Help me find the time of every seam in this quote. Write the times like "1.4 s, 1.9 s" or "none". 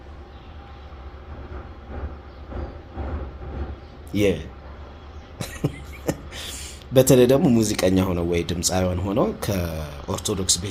none